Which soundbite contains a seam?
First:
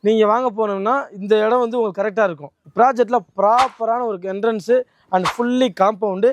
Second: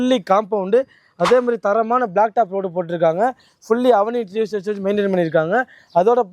first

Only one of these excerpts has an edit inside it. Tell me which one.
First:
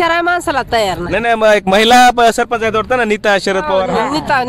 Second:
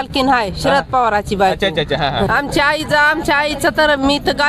second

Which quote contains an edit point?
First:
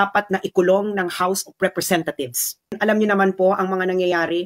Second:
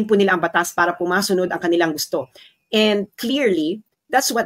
first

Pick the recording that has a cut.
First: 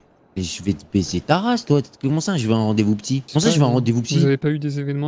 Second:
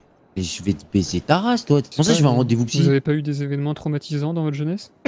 second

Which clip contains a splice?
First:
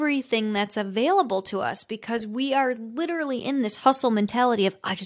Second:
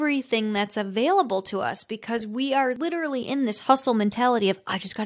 second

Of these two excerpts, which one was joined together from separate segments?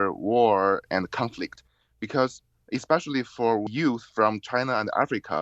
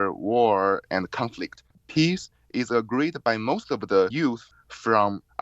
second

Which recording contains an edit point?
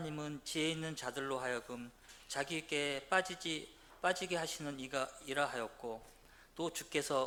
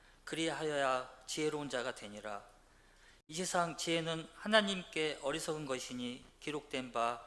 second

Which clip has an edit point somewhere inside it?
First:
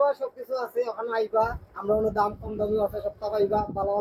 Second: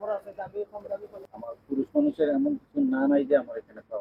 second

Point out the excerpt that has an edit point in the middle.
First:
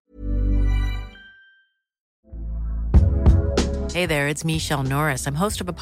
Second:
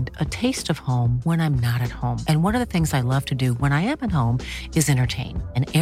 first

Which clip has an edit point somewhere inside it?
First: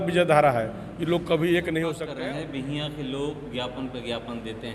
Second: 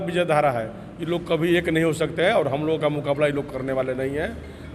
first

